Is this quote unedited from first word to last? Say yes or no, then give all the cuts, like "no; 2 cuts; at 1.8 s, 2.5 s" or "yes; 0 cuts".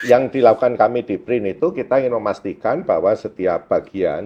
yes; 0 cuts